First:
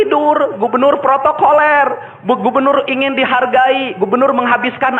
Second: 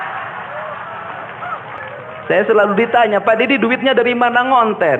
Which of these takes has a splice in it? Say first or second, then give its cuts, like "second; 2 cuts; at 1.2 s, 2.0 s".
second; 1 cut; at 1.8 s